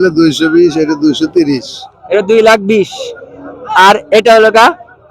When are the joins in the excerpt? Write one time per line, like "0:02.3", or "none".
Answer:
none